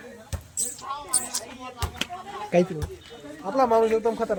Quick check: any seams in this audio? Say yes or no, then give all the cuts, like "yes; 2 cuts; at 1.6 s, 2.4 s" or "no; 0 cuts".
no; 0 cuts